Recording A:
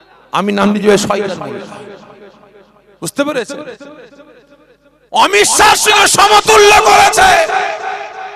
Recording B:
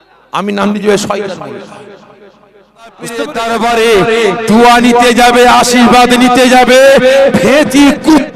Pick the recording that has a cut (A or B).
B